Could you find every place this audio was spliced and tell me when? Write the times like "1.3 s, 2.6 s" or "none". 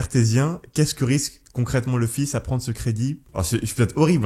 none